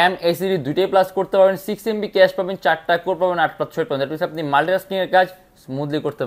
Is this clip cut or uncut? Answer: uncut